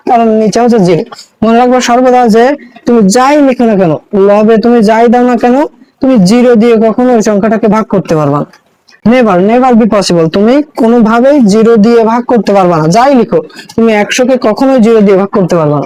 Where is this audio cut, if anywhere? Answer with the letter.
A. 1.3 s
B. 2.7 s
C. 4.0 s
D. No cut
D